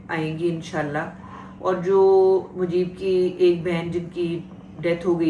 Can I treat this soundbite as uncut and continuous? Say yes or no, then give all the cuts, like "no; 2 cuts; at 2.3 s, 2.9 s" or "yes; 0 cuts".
yes; 0 cuts